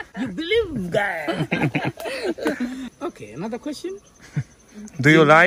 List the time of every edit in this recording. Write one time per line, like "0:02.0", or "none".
0:02.9